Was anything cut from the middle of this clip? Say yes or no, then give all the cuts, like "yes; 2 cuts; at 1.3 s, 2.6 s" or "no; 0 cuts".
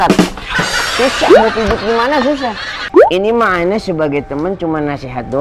yes; 1 cut; at 2.7 s